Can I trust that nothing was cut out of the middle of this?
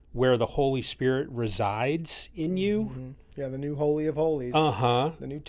yes; 0 cuts

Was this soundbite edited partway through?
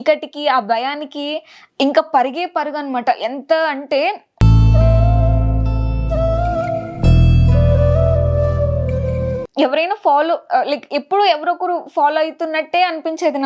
yes; 2 cuts; at 4.3 s, 9.4 s

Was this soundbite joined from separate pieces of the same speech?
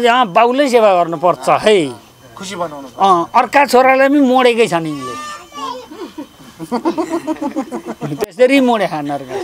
no; 0 cuts

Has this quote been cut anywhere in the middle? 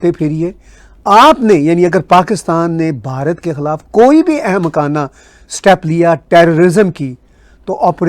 no; 0 cuts

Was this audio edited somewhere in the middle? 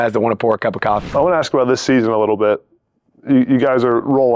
yes; 1 cut; at 1.0 s

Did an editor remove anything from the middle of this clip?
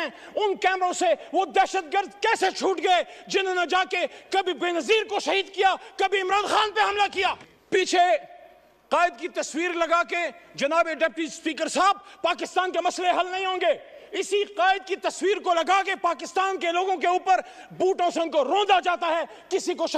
no; 0 cuts

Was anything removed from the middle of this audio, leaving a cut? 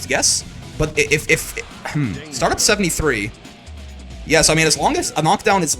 no; 0 cuts

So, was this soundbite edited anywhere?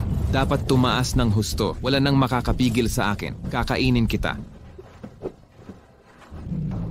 no; 0 cuts

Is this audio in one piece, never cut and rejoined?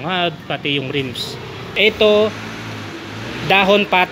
no; 1 cut; at 1.7 s

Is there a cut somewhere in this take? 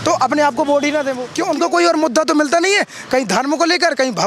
yes; 1 cut; at 1.2 s

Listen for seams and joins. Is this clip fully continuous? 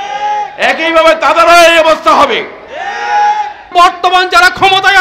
no; 1 cut; at 3.7 s

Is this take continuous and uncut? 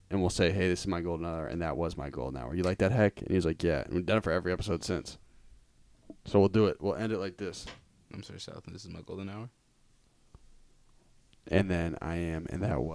yes; 0 cuts

